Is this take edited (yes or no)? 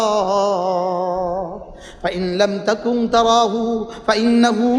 no